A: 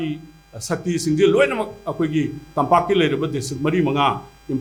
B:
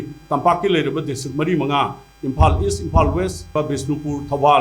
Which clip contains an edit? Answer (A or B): B